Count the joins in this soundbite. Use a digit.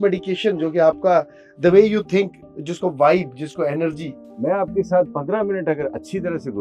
1